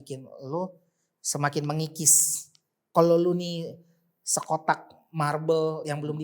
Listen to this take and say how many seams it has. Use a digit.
1